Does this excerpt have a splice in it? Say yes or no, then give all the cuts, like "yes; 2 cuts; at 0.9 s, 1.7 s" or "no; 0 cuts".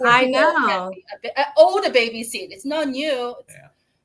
no; 0 cuts